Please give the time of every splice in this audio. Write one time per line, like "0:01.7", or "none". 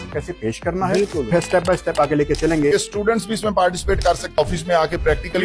0:01.3
0:02.7
0:04.3